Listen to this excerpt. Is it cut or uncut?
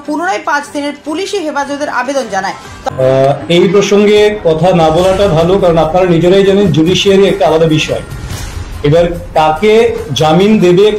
cut